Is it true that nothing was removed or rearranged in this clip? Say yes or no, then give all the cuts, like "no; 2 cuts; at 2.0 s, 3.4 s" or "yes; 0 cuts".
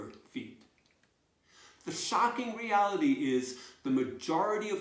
no; 1 cut; at 1.0 s